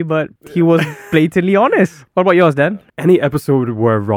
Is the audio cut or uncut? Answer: cut